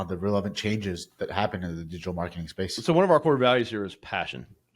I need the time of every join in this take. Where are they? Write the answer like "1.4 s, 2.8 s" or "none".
2.8 s